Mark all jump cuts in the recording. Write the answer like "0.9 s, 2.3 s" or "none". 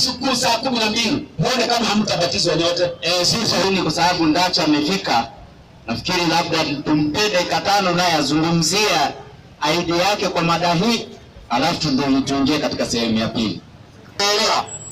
3.6 s, 14.2 s